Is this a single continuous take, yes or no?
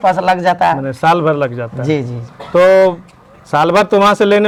yes